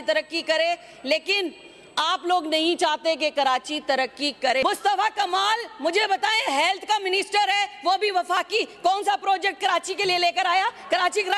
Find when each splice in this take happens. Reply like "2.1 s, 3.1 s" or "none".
4.6 s